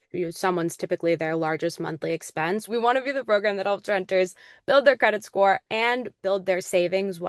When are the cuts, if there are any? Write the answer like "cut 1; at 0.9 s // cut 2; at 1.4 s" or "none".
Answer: cut 1; at 2.7 s // cut 2; at 5.7 s